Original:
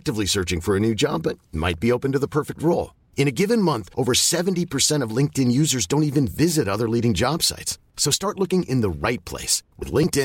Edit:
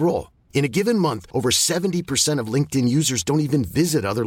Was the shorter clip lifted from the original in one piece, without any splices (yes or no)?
yes